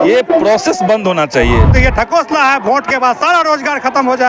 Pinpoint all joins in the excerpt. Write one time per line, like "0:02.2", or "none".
0:01.7